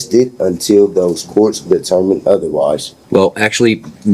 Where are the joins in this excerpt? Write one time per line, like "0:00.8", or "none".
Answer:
0:02.9